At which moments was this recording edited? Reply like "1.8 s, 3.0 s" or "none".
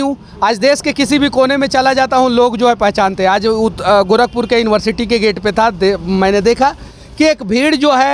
none